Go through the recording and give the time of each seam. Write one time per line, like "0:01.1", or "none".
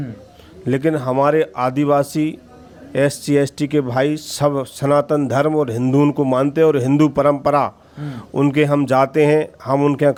none

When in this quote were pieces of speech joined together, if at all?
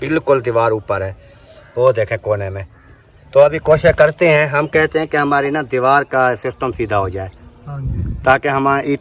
none

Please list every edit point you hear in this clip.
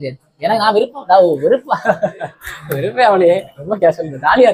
none

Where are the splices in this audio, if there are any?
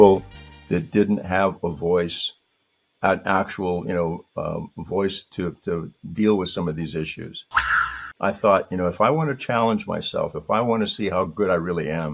0:07.8

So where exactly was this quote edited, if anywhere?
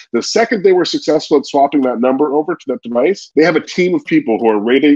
0:03.2

